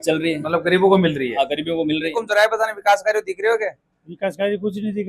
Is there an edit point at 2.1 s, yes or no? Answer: yes